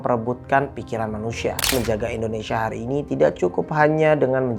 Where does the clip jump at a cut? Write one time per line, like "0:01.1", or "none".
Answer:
0:01.7